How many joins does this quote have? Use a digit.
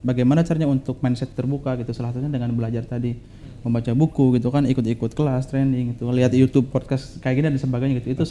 0